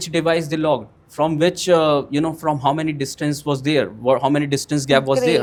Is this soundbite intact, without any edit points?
yes; 0 cuts

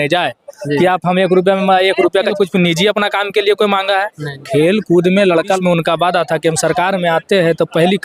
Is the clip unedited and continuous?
no; 2 cuts; at 2.3 s, 5.6 s

